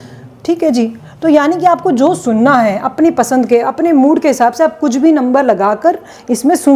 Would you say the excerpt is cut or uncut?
uncut